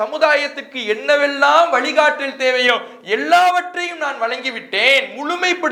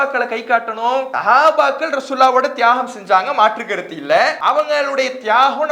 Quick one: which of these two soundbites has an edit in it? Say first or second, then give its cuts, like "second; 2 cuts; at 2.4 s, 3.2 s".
second; 2 cuts; at 1.1 s, 4.4 s